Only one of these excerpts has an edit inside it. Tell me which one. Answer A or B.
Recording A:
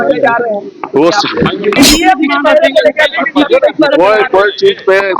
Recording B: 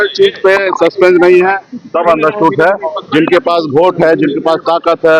A